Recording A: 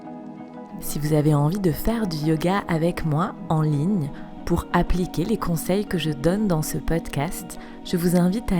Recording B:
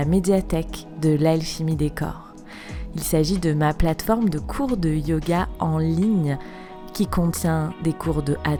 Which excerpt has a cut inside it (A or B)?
A